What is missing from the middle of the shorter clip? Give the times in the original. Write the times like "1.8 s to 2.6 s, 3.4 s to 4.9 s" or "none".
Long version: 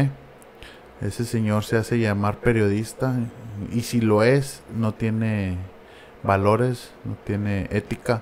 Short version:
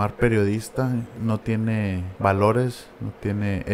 3.7 s to 5.5 s